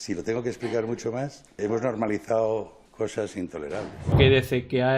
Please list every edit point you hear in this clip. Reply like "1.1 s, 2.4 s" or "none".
1.6 s, 2.8 s, 4.1 s